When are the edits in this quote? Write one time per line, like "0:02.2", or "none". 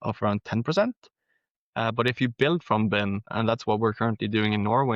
0:03.2